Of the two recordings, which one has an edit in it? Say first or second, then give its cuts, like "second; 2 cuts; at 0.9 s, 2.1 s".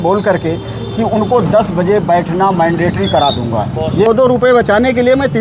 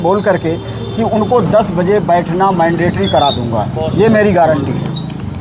first; 1 cut; at 4.1 s